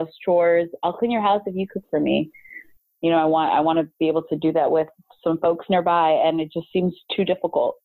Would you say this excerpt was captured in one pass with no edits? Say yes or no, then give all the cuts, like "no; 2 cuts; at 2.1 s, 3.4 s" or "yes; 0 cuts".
yes; 0 cuts